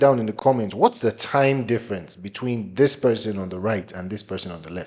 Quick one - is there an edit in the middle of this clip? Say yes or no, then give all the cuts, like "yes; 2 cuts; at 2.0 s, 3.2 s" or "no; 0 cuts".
no; 0 cuts